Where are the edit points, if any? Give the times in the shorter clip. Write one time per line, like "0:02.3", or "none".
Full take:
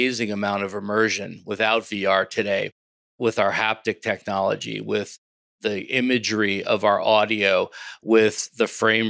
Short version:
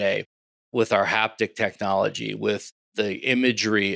0:02.8